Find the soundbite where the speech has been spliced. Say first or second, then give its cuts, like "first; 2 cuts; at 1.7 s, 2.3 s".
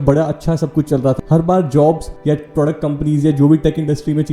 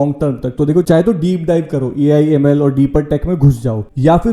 first; 2 cuts; at 1.2 s, 2.1 s